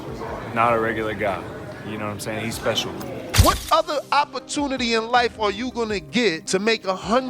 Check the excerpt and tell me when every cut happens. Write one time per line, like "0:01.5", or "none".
0:03.3